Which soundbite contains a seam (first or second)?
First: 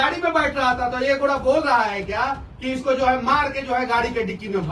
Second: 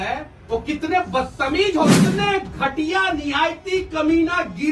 second